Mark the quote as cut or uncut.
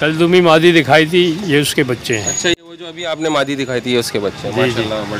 uncut